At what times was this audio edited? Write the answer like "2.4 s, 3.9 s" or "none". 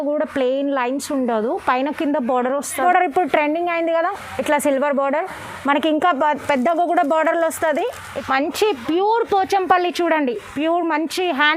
2.8 s, 8.0 s